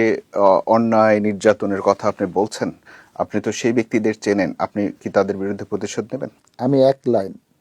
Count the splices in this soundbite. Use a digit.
0